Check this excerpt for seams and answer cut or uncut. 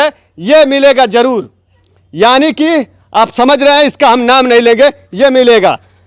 uncut